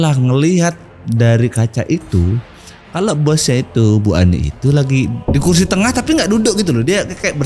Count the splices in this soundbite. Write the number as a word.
one